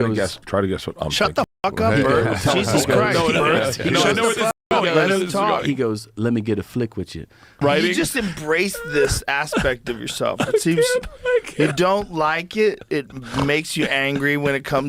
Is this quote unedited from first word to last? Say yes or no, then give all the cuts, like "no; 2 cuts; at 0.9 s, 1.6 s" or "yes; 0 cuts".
yes; 0 cuts